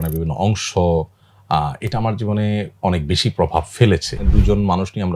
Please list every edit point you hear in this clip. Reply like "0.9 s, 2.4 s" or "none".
4.2 s